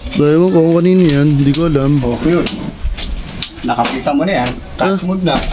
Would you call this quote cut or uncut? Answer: uncut